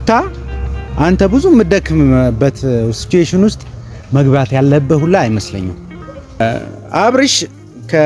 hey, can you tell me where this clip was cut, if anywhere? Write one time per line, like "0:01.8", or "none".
0:06.4